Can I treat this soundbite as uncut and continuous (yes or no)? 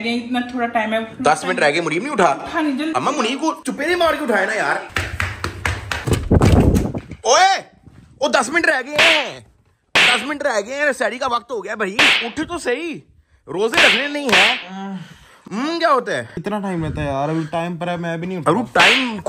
yes